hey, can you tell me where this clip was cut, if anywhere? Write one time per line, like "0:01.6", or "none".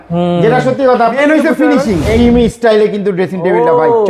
0:01.1
0:02.2